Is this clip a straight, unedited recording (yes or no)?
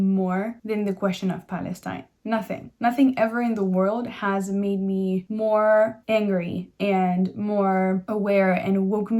yes